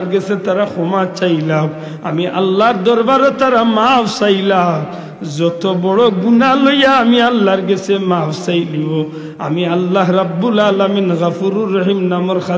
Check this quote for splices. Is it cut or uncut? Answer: uncut